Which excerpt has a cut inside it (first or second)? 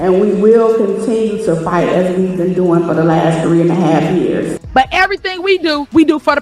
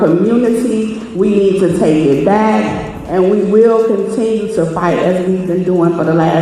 first